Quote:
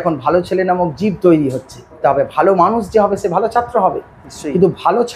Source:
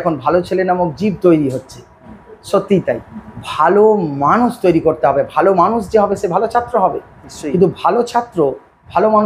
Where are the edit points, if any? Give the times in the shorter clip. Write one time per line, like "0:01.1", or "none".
0:02.0